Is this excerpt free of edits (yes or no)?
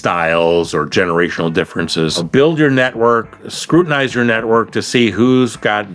no